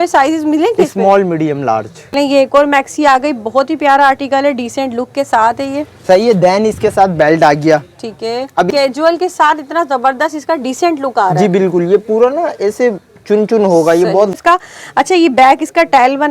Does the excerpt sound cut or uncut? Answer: cut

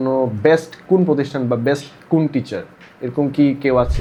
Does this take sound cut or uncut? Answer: uncut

